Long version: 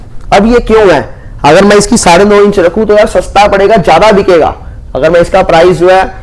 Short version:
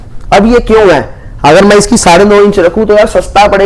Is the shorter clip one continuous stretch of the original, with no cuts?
yes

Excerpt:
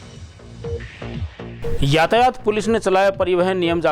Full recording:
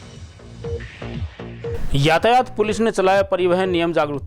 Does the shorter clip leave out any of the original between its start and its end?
yes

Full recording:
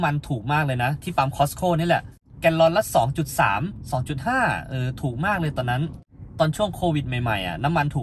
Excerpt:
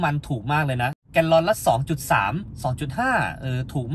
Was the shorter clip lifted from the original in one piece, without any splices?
no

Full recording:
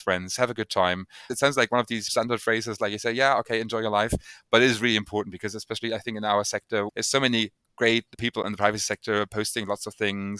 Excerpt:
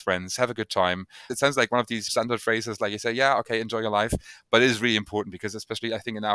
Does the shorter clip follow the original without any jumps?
yes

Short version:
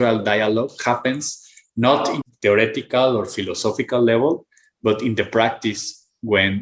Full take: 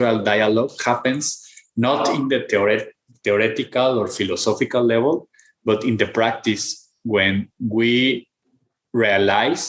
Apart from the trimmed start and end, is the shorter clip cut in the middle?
yes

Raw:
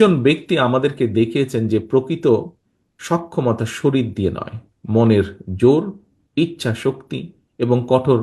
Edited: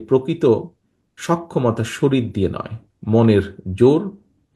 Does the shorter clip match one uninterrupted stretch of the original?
yes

